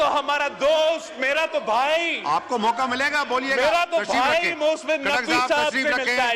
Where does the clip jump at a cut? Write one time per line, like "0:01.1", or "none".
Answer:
none